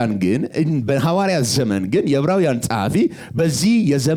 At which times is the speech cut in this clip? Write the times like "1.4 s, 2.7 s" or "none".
none